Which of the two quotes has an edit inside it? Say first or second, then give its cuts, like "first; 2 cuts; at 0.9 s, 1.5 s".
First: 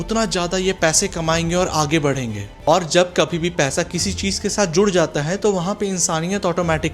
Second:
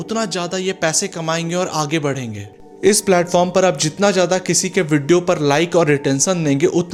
first; 1 cut; at 2.5 s